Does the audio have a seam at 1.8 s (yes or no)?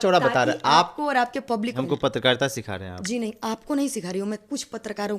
yes